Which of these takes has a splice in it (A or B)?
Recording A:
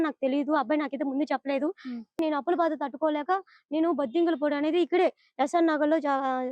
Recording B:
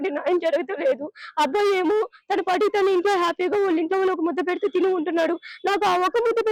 A